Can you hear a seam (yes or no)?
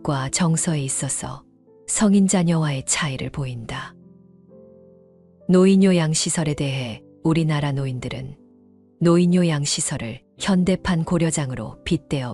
no